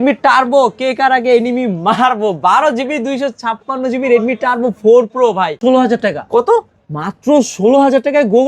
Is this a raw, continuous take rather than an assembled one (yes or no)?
no